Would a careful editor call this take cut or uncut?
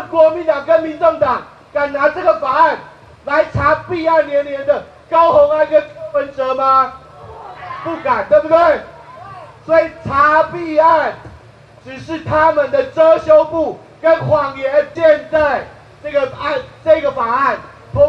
cut